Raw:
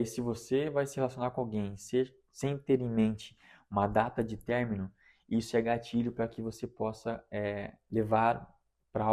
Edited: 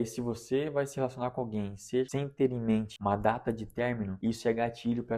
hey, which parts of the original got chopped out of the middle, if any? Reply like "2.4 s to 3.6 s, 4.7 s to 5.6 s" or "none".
2.1 s to 2.4 s, 3.2 s to 3.6 s, 4.8 s to 5.2 s